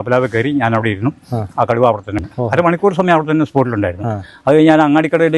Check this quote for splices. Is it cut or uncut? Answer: cut